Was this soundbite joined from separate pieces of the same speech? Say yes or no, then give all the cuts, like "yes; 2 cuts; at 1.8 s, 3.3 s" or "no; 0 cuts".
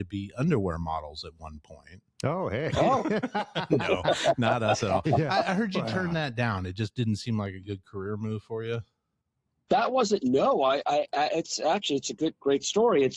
no; 0 cuts